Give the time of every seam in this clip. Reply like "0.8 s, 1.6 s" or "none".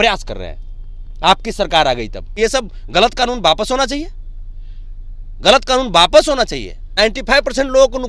2.2 s, 6.9 s